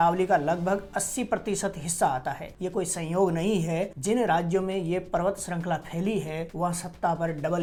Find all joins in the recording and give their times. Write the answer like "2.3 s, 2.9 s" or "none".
none